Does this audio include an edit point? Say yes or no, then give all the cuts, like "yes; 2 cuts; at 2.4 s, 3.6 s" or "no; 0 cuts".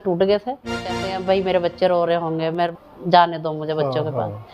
yes; 2 cuts; at 1.1 s, 2.7 s